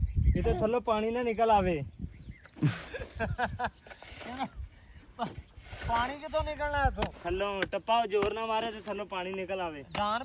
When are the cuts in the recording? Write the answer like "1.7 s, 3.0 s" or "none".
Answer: none